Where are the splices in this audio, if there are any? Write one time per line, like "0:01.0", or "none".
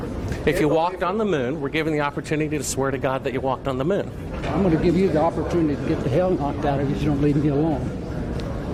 none